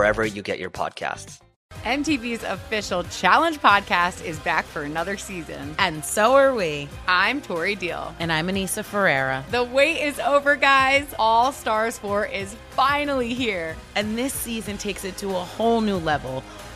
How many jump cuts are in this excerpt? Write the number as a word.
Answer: one